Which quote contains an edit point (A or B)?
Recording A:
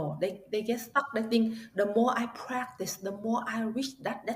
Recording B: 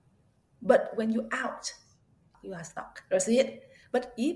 B